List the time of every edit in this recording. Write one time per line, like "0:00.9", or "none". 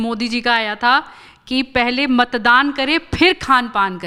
none